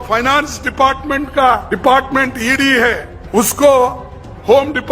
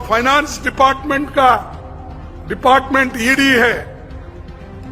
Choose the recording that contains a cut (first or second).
first